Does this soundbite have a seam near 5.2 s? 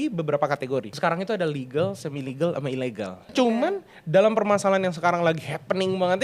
no; 2 cuts; at 0.9 s, 3.2 s

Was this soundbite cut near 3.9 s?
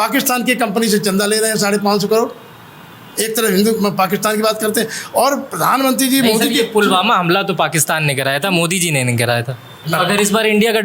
no; 1 cut; at 9.9 s

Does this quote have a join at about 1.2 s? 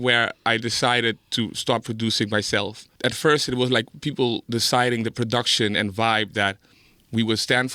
no; 1 cut; at 2.9 s

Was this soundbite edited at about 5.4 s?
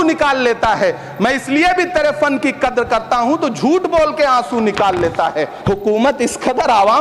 yes; 1 cut; at 5.4 s

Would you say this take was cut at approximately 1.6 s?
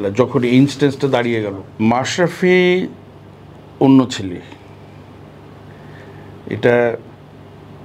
yes; 1 cut; at 1.6 s

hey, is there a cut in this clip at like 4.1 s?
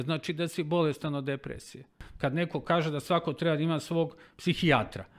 no; 1 cut; at 2.0 s

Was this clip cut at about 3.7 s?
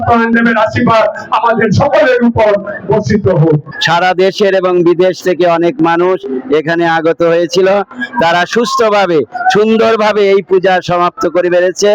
yes; 1 cut; at 3.7 s

